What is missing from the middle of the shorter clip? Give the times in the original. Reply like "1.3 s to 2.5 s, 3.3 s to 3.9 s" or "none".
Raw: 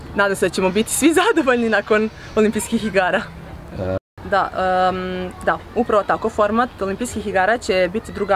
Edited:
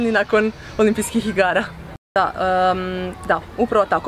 3.5 s to 4.1 s